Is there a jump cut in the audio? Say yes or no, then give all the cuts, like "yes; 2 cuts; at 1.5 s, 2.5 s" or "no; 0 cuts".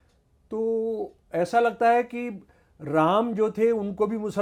no; 0 cuts